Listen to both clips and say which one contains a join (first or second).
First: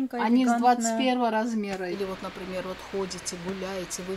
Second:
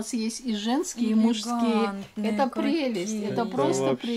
first